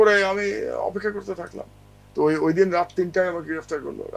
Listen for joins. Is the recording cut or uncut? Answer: uncut